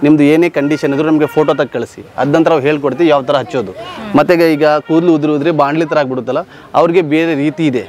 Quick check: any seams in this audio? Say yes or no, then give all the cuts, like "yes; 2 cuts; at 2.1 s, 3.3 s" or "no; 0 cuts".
no; 0 cuts